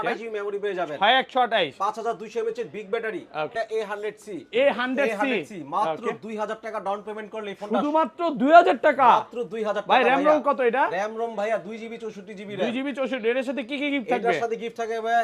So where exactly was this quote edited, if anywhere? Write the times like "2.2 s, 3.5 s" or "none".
3.5 s